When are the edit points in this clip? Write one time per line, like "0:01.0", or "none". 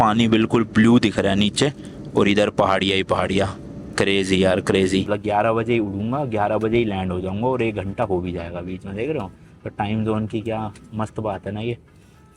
0:05.0

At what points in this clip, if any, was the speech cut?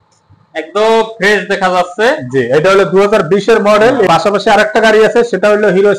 0:04.1

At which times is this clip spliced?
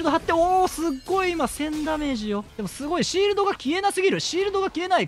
0:02.5

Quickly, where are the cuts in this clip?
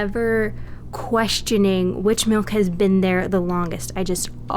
none

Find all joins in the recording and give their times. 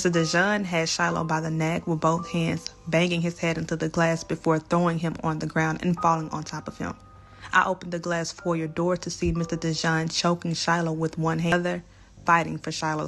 0:11.5

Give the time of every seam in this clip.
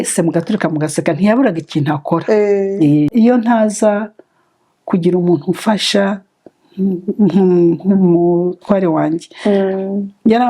0:03.1

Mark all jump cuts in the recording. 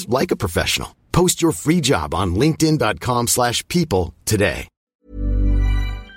0:04.8

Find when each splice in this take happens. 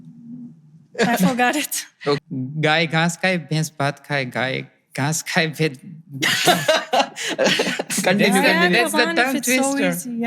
0:02.2

